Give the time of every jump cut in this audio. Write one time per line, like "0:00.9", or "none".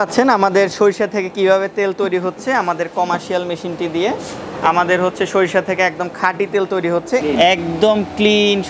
0:07.2